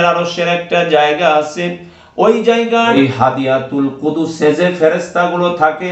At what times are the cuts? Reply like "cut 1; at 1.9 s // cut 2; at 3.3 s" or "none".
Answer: cut 1; at 2.9 s